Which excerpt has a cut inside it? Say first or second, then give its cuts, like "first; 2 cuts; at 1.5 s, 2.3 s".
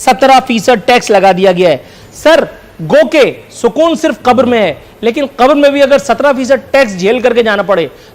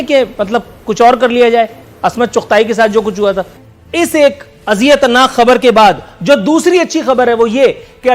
second; 1 cut; at 3.5 s